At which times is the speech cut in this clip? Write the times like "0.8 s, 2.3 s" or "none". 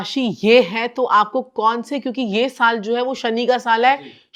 none